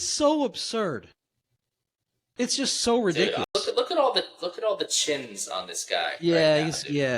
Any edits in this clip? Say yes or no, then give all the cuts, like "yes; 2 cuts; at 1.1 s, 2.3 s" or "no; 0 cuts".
yes; 1 cut; at 3.5 s